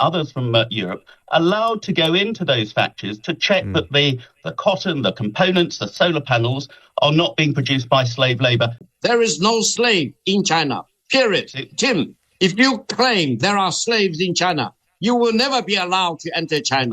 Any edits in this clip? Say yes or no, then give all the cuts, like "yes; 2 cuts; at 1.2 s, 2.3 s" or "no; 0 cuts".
yes; 1 cut; at 8.8 s